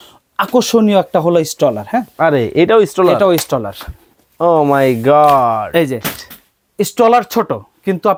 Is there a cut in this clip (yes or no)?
no